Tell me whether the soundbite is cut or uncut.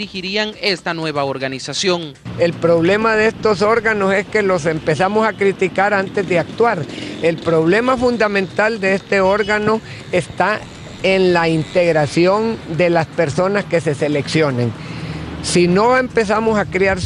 uncut